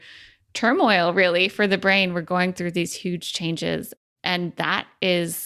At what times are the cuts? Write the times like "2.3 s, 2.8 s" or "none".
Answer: 4.0 s